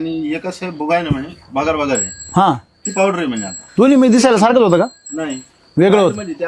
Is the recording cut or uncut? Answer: uncut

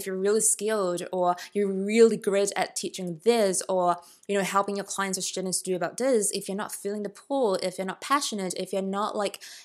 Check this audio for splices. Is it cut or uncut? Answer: uncut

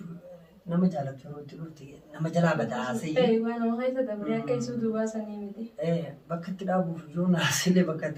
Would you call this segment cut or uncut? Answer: uncut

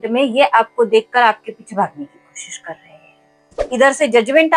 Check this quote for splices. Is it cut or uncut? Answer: cut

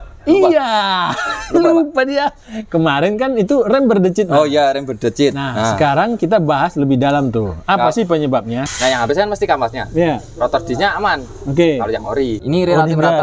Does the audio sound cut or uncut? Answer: cut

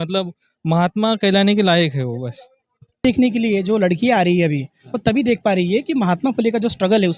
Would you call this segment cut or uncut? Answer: cut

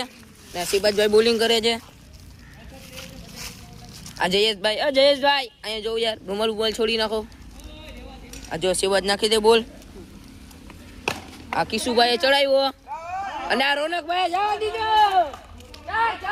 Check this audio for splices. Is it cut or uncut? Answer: uncut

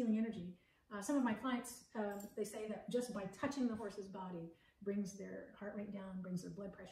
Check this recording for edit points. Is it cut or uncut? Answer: uncut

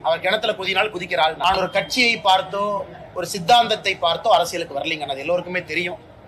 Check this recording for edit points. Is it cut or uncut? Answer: cut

